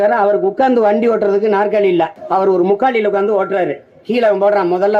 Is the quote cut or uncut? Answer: cut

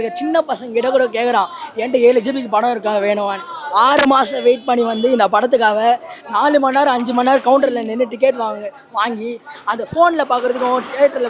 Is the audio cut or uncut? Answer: uncut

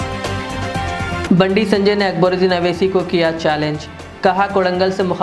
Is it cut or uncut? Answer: cut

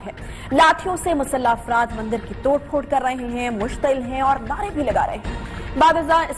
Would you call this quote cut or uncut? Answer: uncut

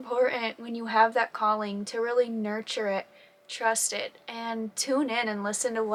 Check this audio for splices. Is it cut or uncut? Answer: uncut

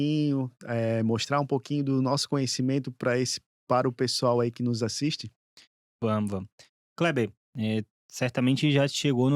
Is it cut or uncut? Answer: uncut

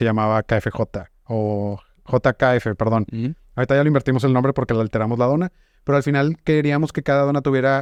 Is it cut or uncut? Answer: uncut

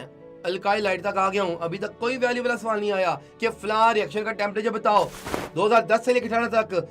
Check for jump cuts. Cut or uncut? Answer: cut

